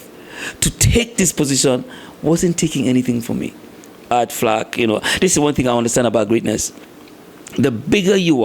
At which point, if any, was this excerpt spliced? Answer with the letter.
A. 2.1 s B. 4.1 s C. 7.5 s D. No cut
B